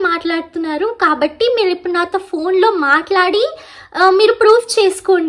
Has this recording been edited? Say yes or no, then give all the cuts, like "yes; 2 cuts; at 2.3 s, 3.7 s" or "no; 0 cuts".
no; 0 cuts